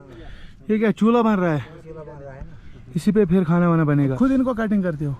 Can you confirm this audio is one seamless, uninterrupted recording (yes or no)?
no